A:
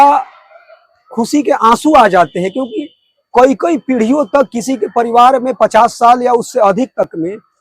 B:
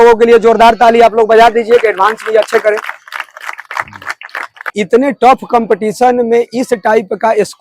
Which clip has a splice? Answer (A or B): B